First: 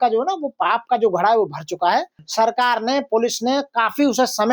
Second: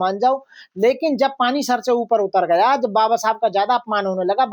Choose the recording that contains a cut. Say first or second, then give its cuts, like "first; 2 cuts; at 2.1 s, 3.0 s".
first; 1 cut; at 2.2 s